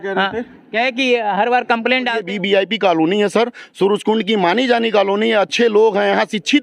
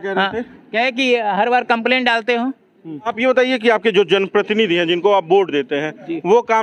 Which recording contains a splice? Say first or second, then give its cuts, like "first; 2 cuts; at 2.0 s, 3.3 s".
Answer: first; 1 cut; at 2.2 s